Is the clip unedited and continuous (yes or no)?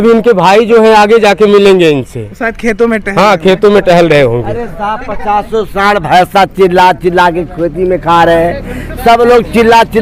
yes